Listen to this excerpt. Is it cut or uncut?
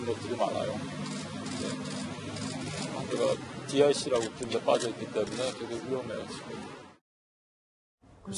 uncut